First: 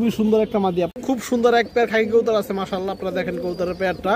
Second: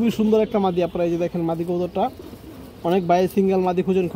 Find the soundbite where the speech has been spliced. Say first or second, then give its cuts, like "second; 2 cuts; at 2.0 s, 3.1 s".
first; 1 cut; at 0.9 s